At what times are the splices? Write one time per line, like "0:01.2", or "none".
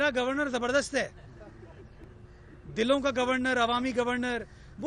none